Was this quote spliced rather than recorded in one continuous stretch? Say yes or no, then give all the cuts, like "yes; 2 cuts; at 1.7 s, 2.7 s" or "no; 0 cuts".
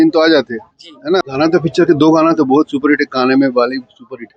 yes; 1 cut; at 1.2 s